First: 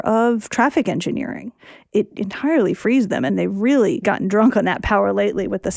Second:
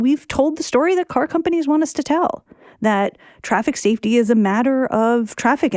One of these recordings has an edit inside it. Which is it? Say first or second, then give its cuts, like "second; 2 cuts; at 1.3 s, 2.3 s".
first; 3 cuts; at 2.0 s, 3.3 s, 4.0 s